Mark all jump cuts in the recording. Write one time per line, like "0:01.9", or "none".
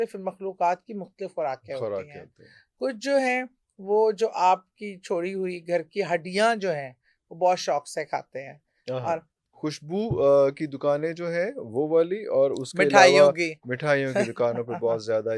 0:09.4